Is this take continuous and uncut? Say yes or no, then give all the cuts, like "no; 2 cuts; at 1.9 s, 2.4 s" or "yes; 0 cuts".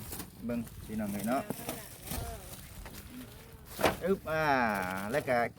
yes; 0 cuts